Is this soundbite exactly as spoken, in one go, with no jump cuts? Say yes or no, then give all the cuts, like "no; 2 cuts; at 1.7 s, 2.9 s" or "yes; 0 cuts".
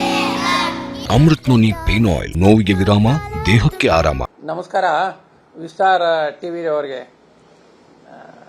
no; 3 cuts; at 1.0 s, 2.3 s, 4.3 s